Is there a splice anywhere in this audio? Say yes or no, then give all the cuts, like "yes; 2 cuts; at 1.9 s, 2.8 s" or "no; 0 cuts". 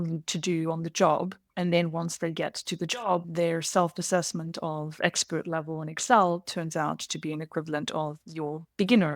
yes; 3 cuts; at 1.4 s, 3.3 s, 8.2 s